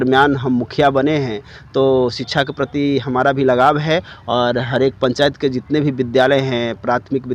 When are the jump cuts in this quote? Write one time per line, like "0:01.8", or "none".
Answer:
none